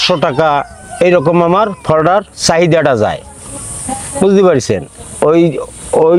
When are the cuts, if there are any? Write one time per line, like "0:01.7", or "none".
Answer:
none